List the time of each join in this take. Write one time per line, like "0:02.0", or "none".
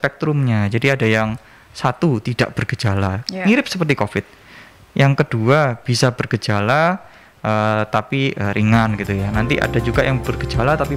none